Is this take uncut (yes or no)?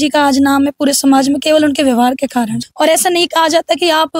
no